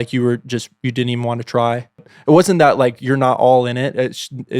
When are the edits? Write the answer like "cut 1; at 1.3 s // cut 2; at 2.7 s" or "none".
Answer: cut 1; at 2.1 s